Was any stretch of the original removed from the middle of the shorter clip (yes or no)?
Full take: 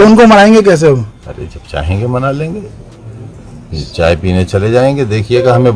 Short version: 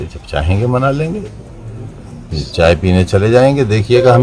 no